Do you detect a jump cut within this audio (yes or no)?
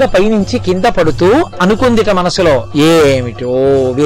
no